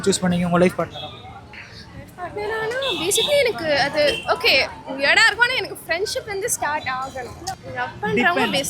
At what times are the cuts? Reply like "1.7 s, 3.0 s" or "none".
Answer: 7.6 s